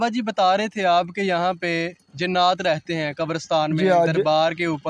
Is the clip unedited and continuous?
yes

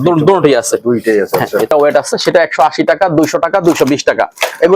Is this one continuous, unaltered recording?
no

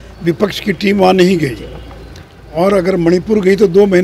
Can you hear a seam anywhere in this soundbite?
no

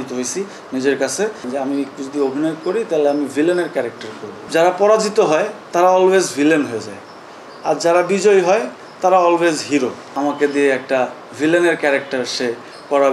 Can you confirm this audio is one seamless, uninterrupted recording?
no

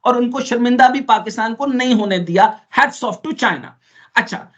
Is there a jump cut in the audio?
no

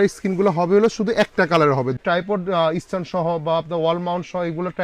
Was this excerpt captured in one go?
no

